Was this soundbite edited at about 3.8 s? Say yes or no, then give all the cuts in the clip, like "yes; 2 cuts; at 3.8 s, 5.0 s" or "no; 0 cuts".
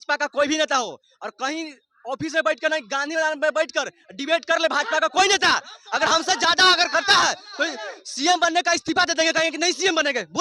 no; 0 cuts